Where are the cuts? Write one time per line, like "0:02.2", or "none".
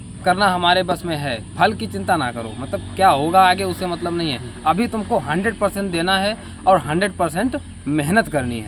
none